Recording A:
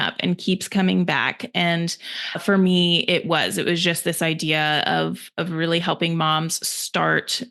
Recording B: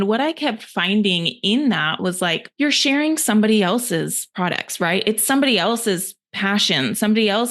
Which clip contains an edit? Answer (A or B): B